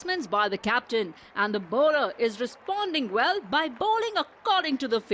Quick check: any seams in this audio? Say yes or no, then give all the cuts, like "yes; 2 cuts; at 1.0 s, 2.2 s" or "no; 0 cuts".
no; 0 cuts